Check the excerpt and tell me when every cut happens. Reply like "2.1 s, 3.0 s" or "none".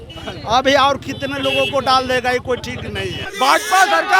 3.2 s